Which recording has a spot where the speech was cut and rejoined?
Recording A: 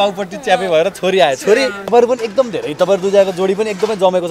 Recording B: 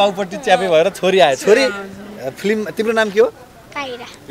A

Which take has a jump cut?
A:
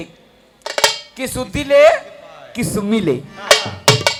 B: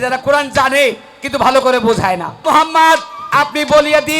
B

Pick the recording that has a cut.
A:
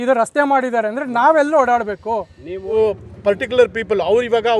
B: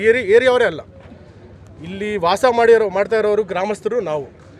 A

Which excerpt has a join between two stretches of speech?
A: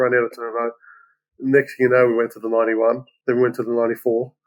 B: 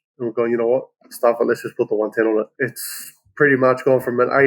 B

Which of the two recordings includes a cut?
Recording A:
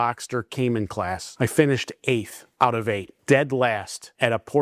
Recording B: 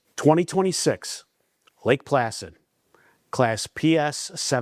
A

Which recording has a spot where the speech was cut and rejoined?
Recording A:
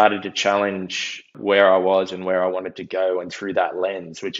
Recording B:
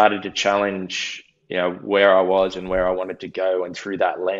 A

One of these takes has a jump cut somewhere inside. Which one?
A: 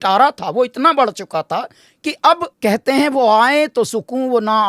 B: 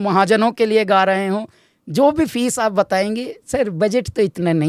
A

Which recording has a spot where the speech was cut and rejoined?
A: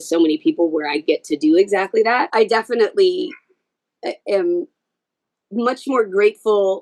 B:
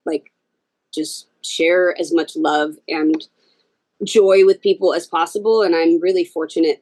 A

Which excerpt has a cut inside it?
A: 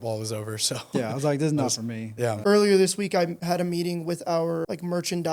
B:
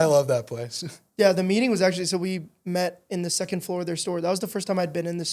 A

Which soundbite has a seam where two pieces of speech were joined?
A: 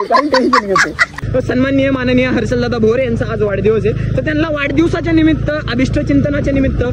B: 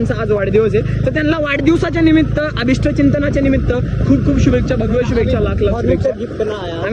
A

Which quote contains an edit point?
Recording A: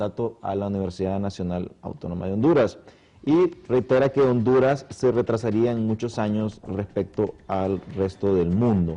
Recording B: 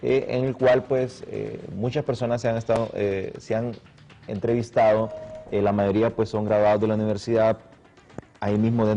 A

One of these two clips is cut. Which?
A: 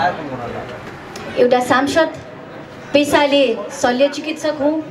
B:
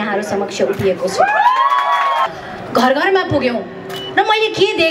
B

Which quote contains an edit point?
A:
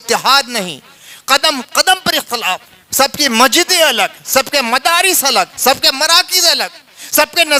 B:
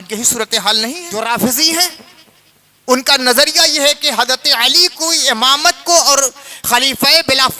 B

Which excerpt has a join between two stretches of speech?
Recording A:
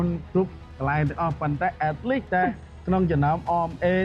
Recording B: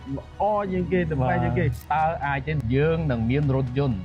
B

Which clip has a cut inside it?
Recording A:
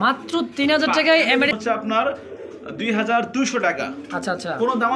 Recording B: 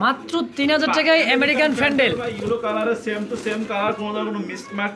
A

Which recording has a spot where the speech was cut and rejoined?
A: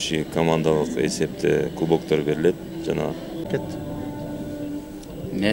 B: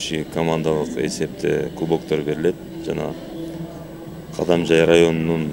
A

